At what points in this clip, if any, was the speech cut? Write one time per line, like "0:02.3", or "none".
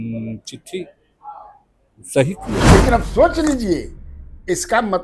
0:02.7